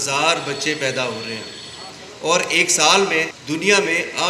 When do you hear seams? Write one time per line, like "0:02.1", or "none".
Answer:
0:03.4